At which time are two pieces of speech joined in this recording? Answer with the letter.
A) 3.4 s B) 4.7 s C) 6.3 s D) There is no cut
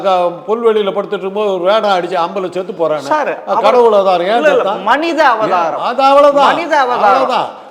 D